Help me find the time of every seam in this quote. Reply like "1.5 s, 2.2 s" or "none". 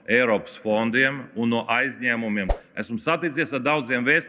2.5 s